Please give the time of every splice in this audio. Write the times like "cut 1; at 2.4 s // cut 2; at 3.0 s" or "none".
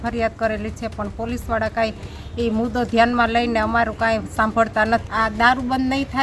cut 1; at 5.1 s